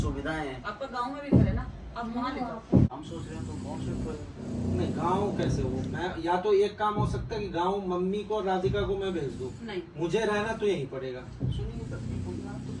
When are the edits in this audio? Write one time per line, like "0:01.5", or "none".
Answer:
0:02.9